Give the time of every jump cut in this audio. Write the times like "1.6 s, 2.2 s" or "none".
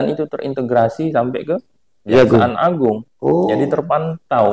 none